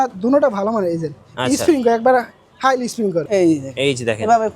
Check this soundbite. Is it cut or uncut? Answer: cut